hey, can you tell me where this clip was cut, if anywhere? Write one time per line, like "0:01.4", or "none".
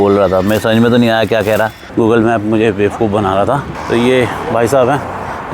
0:01.8
0:03.7